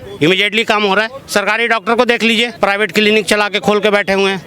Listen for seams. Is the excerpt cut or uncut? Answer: cut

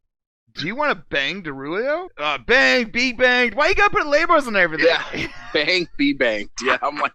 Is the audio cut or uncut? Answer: cut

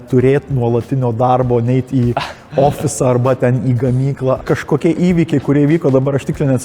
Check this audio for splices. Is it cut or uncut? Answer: cut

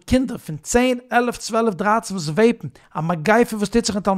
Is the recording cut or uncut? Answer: uncut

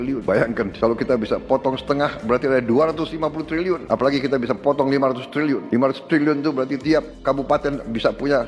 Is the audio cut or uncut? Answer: uncut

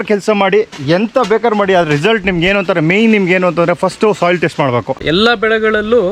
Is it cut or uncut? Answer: cut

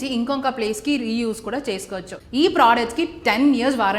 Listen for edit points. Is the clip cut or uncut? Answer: cut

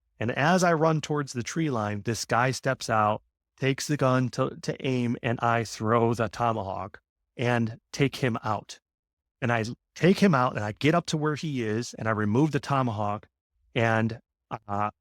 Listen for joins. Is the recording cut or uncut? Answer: uncut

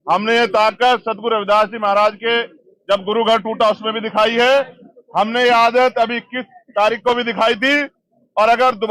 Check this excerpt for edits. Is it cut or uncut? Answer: uncut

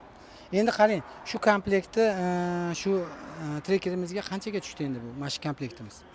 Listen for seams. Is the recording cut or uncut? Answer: uncut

